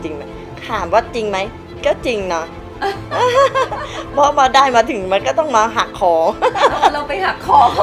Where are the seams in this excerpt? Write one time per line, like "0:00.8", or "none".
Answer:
none

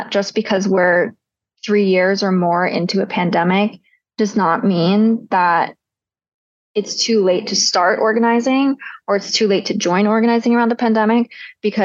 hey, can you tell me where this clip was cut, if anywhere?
none

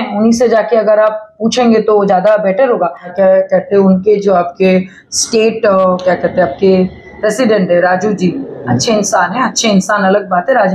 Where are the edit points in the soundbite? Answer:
0:03.1

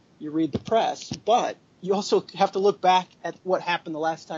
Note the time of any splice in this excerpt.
0:03.2

